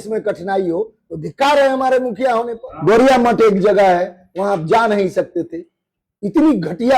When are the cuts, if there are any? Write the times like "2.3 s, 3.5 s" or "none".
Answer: 2.6 s